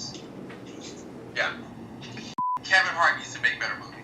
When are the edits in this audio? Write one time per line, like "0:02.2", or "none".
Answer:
0:02.3